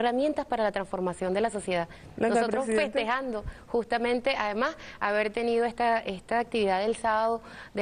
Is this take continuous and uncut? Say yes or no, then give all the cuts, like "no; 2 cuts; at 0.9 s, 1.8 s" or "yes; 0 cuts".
no; 1 cut; at 5.2 s